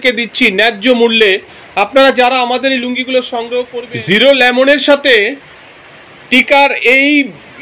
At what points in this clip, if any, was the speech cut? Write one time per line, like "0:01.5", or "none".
0:03.8